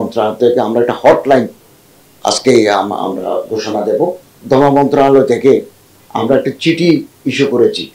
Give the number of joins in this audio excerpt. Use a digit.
1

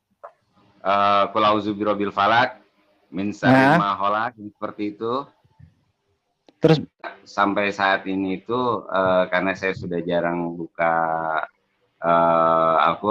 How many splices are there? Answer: 1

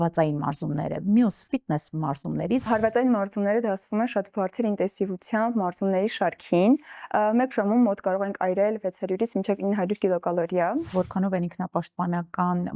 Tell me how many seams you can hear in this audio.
2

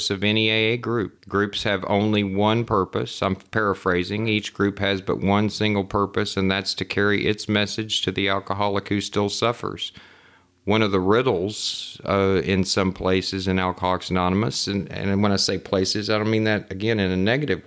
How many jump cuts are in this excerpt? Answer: 1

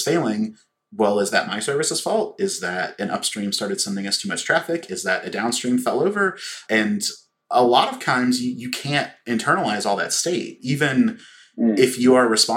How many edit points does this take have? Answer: 0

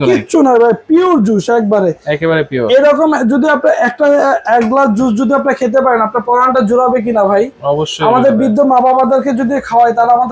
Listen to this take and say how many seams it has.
0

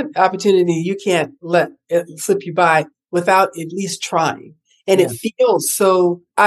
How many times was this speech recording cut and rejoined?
0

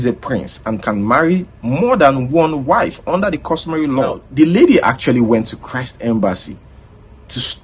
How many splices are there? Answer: 1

